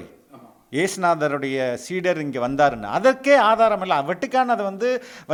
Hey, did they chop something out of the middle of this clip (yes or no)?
no